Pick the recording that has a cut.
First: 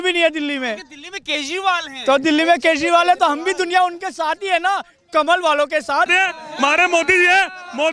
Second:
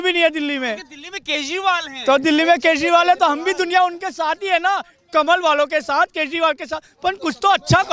first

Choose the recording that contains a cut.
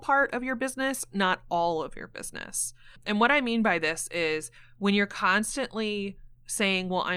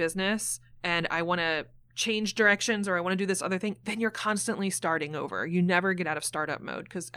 first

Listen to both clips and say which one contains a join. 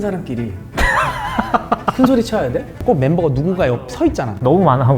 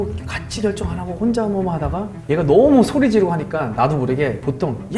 first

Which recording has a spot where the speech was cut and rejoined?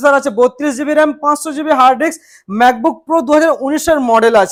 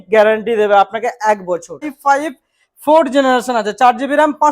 second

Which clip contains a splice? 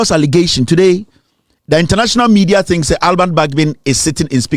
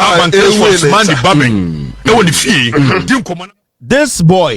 second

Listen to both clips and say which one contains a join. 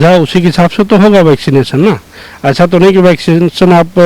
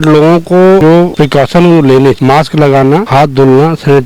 second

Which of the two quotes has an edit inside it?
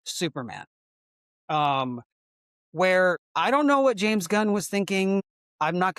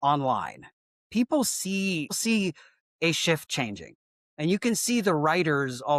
first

